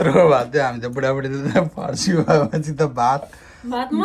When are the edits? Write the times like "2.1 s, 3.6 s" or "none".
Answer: none